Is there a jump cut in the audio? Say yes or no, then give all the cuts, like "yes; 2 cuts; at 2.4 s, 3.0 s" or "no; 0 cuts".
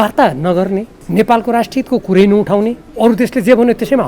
yes; 2 cuts; at 1.0 s, 2.8 s